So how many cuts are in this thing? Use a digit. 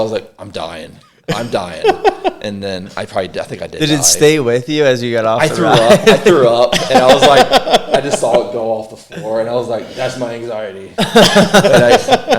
0